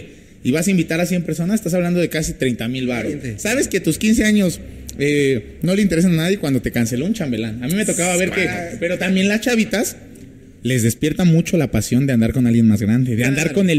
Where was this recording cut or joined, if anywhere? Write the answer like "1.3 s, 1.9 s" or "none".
3.3 s, 8.7 s